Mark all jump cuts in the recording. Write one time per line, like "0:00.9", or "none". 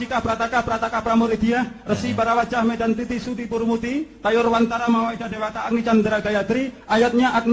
none

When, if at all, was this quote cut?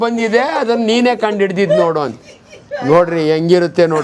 none

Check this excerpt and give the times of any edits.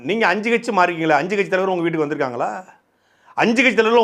none

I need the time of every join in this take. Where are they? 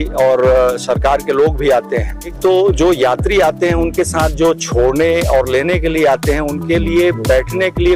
0:02.4

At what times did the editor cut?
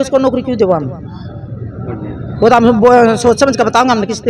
none

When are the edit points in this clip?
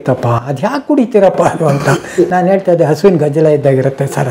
none

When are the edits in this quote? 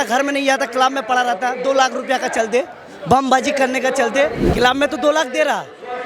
0:04.4

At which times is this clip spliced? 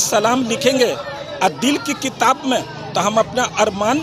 none

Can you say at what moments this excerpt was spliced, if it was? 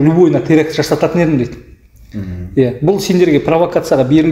none

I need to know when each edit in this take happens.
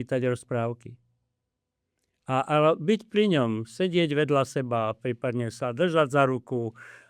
none

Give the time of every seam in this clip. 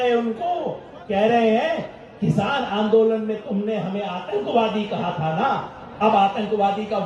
none

